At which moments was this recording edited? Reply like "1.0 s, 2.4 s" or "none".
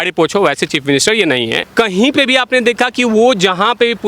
1.6 s